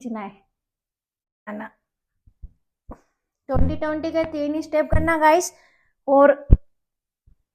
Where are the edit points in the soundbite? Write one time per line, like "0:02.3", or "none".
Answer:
0:01.5